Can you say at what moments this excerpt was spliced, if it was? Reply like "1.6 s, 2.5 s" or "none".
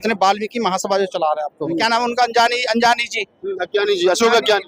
1.8 s